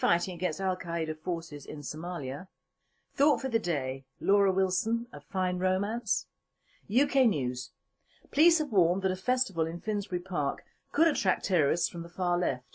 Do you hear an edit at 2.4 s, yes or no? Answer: no